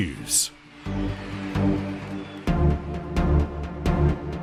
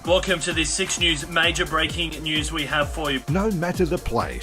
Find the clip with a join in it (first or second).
second